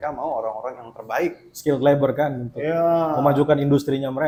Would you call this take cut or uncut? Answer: uncut